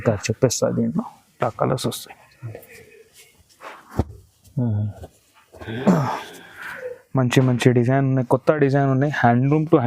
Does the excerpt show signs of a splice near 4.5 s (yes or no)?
no